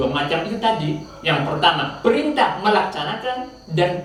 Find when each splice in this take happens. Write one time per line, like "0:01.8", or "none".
none

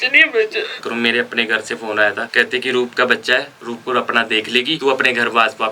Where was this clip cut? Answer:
0:00.8
0:02.2
0:04.8

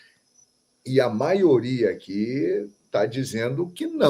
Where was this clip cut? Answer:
none

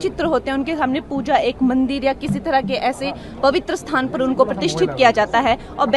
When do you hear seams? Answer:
none

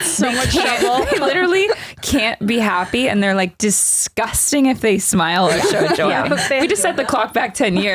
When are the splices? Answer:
0:06.7

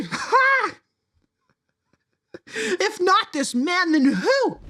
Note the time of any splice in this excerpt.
none

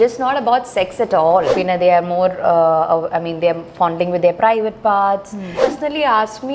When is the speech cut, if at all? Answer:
0:01.5
0:05.6

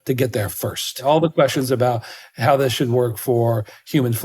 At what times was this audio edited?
0:01.0

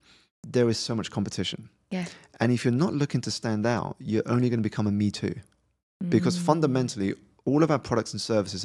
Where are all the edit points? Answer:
none

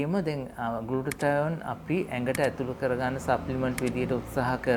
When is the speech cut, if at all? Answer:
none

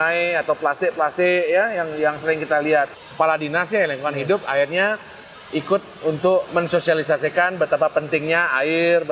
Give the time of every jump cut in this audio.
0:02.9
0:06.5

